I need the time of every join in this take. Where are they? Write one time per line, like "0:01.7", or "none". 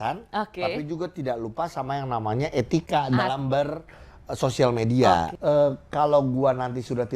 0:05.3